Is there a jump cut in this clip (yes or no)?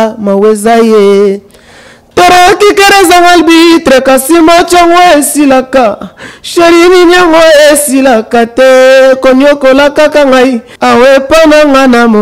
yes